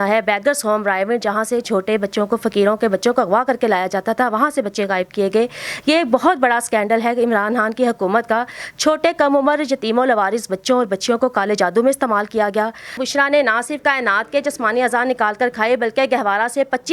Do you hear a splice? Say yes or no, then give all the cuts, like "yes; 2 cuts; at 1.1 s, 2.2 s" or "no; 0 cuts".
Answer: yes; 1 cut; at 13.0 s